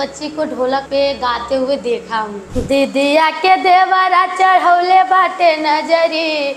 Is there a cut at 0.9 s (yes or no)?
yes